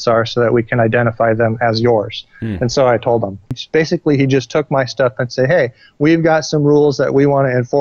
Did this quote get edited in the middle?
yes; 1 cut; at 3.6 s

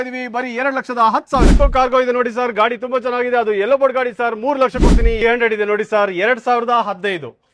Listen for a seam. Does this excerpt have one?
yes; 2 cuts; at 1.5 s, 5.2 s

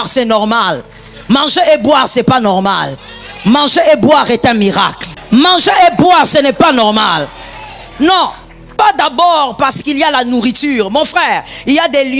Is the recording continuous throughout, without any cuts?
no; 2 cuts; at 5.1 s, 8.6 s

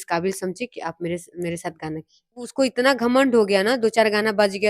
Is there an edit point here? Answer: yes; 1 cut; at 2.5 s

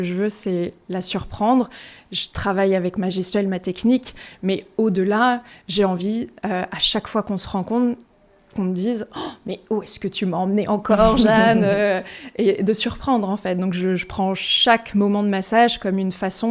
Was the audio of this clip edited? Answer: no; 0 cuts

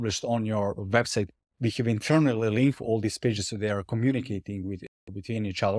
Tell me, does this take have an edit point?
no; 0 cuts

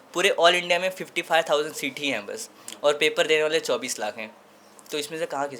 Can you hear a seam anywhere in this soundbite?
no; 0 cuts

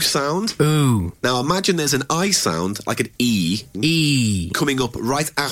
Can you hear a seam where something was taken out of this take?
yes; 2 cuts; at 1.1 s, 3.7 s

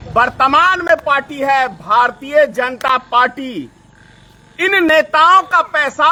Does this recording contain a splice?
no; 0 cuts

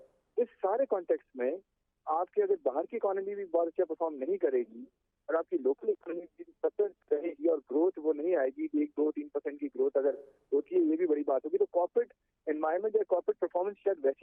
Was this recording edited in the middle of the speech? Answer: no; 0 cuts

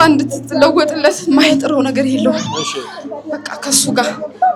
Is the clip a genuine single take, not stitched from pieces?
yes; 0 cuts

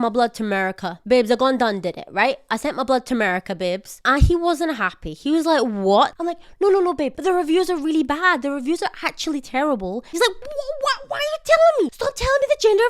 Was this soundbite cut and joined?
yes; 4 cuts; at 6.2 s, 7.1 s, 10.2 s, 11.9 s

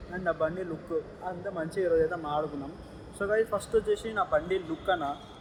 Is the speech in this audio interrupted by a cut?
no; 0 cuts

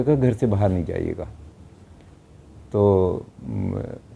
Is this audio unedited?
yes; 0 cuts

